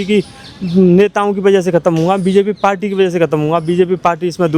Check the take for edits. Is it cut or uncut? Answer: uncut